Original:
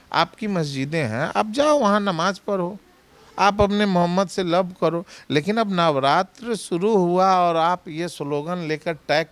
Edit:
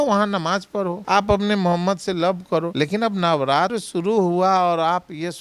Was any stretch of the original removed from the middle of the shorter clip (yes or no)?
yes